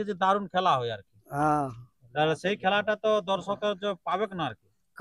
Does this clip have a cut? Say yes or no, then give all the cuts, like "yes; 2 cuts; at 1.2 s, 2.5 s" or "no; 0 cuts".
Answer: no; 0 cuts